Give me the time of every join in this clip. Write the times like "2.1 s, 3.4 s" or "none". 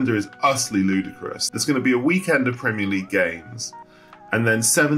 1.4 s